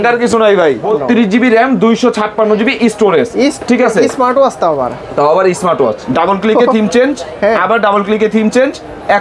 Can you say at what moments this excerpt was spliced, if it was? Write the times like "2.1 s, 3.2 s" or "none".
0.8 s, 6.0 s